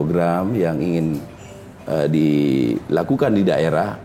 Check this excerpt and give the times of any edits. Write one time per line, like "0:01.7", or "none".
none